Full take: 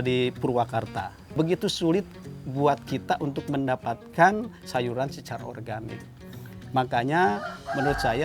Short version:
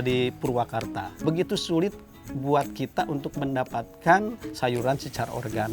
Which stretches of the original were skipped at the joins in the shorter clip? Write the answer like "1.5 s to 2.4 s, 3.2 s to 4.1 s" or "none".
1.1 s to 1.2 s